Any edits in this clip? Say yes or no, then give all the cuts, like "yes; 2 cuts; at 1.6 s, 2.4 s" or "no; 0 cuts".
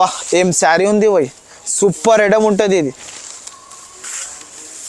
no; 0 cuts